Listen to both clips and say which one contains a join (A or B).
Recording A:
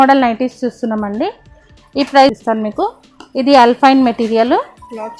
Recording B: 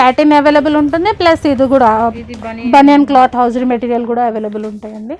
A